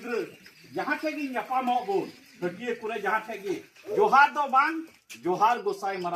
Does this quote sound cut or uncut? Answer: uncut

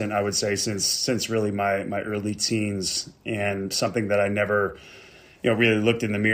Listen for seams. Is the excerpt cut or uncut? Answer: uncut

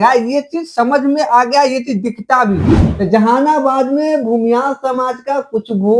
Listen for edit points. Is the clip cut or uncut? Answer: cut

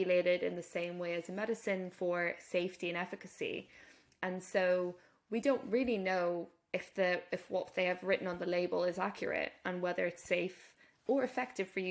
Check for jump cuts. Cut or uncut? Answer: uncut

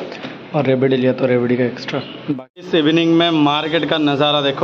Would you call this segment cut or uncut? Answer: cut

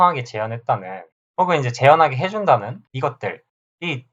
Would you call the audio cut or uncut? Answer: cut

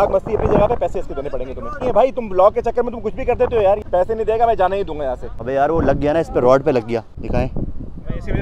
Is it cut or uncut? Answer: cut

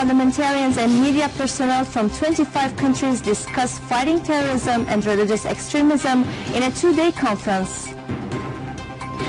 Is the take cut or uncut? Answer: uncut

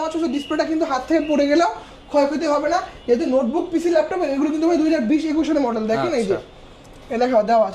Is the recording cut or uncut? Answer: uncut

